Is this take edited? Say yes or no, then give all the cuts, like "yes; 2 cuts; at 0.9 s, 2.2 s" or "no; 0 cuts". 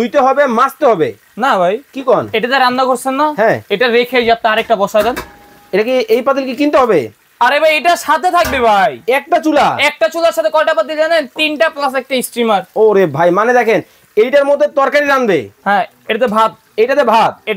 no; 0 cuts